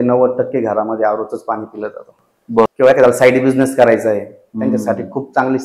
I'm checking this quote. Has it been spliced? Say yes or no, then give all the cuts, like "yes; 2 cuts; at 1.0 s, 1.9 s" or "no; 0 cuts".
yes; 1 cut; at 2.7 s